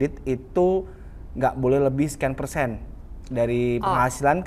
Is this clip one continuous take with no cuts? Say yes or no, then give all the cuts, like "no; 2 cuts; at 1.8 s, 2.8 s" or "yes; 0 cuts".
yes; 0 cuts